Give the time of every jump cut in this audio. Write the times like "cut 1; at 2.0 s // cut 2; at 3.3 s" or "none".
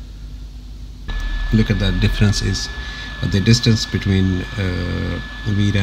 cut 1; at 1.1 s